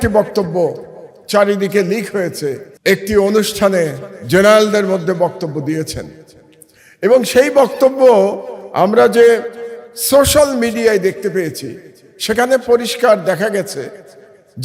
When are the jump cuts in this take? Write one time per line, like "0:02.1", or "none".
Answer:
0:02.7